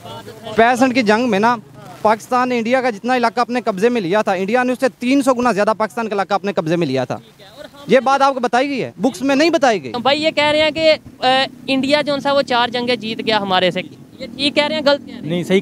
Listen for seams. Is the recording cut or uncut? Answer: cut